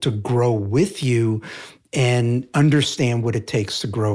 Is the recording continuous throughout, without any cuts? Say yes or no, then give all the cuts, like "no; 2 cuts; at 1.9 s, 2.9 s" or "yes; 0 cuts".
no; 1 cut; at 2.5 s